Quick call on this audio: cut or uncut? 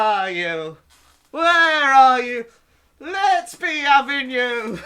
uncut